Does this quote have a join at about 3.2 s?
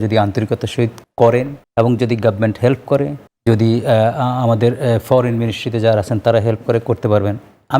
yes; 3 cuts; at 1.0 s, 1.6 s, 3.2 s

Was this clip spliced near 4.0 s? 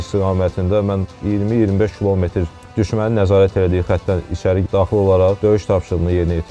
no; 2 cuts; at 1.1 s, 5.4 s

